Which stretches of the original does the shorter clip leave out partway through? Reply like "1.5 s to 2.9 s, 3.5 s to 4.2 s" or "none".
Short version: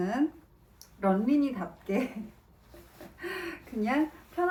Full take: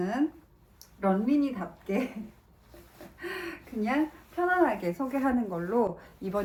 none

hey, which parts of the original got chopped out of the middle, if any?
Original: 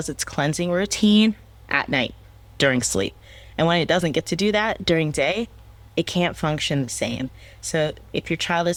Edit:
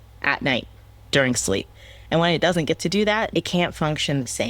4.8 s to 5.9 s

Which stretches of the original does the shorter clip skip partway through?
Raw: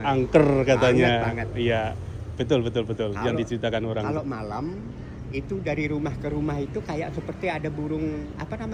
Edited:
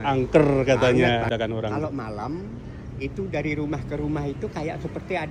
1.3 s to 3.6 s

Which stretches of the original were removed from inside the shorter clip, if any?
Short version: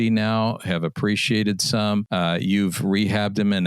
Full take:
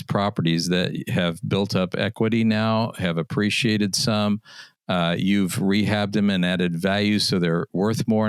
4.4 s to 4.9 s

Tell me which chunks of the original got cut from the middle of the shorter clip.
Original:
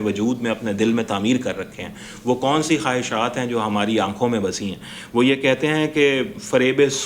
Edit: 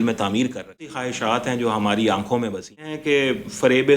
2.0 s to 3.0 s, 4.9 s to 5.9 s

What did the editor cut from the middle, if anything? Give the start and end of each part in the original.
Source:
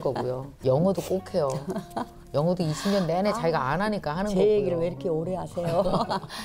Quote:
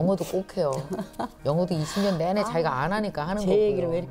2.1 s to 2.2 s

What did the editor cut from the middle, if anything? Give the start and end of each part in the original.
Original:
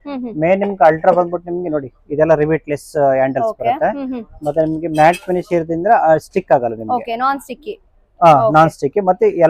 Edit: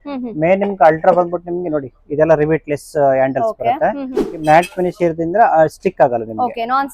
4.3 s to 4.8 s

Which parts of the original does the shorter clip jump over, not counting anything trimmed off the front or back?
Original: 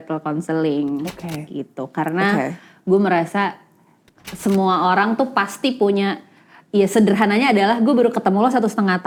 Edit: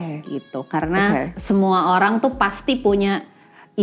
2.6 s to 4.3 s

